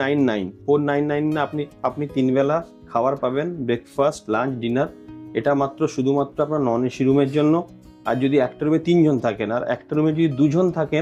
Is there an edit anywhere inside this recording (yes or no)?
no